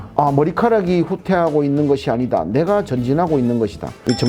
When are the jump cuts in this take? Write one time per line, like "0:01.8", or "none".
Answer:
none